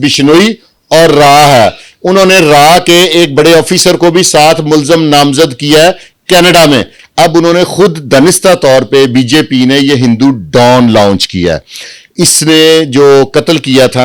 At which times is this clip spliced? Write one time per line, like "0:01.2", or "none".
0:07.0